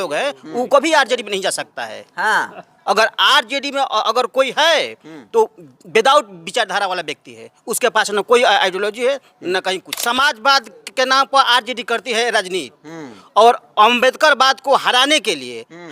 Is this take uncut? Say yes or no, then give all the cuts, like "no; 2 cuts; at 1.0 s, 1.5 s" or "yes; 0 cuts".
no; 1 cut; at 9.9 s